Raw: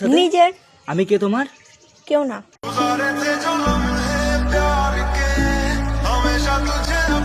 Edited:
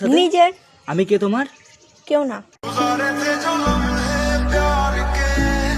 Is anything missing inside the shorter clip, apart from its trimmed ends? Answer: no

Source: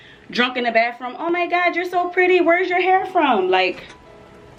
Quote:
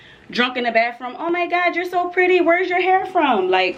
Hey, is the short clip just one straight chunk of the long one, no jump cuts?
yes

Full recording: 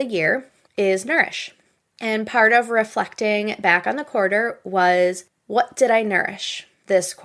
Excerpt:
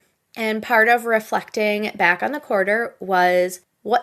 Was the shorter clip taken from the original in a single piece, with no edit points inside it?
yes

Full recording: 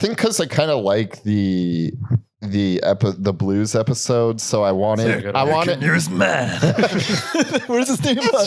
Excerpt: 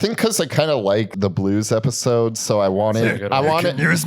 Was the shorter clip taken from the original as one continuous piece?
no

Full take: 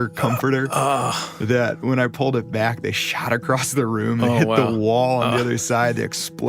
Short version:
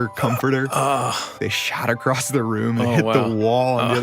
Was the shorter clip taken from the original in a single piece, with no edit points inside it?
no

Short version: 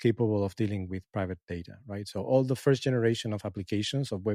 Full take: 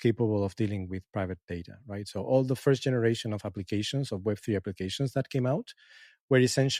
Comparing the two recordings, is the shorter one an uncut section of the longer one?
yes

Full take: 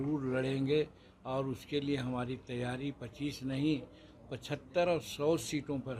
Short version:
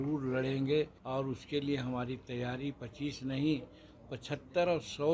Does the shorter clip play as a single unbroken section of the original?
no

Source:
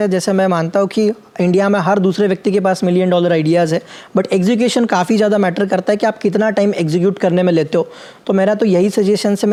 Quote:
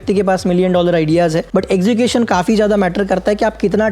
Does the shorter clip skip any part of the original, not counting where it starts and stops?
yes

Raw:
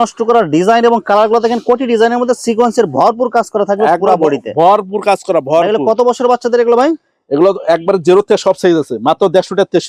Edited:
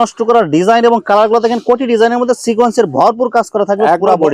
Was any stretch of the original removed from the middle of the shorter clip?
no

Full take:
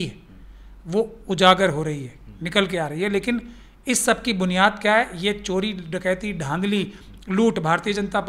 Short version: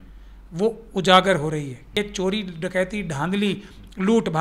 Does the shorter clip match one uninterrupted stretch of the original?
no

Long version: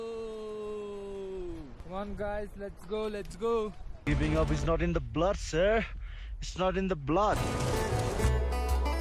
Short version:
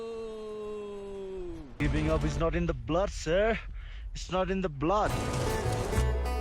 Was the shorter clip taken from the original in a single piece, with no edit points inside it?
no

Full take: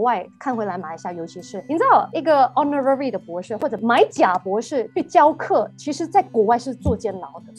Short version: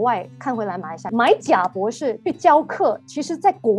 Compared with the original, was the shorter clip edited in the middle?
yes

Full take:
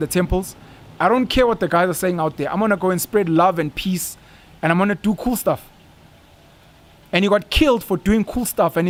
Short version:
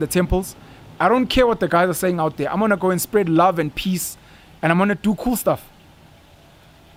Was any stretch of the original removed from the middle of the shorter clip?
no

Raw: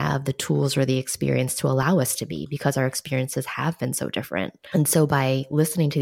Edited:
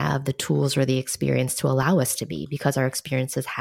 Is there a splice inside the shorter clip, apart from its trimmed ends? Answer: no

